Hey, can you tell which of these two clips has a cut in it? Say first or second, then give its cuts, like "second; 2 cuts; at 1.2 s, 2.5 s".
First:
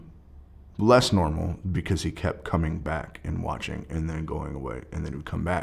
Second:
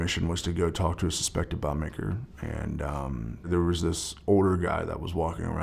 second; 1 cut; at 3.5 s